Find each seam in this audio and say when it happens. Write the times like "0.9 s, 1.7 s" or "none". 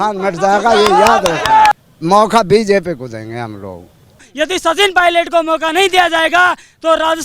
1.7 s, 4.3 s